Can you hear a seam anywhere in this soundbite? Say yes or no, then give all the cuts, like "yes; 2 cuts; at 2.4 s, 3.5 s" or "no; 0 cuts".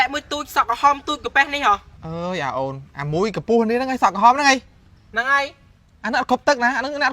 yes; 1 cut; at 2.0 s